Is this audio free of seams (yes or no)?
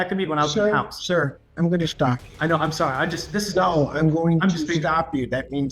yes